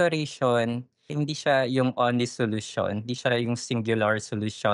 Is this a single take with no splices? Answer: no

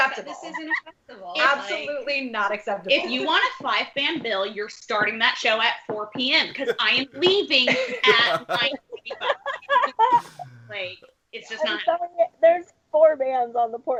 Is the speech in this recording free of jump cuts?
yes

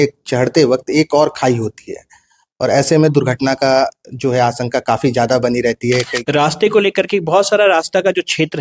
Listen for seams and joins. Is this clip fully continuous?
no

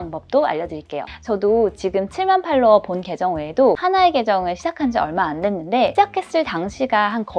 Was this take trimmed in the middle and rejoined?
yes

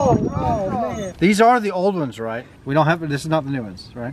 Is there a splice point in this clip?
yes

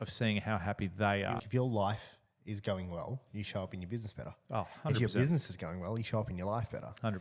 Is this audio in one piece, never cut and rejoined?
no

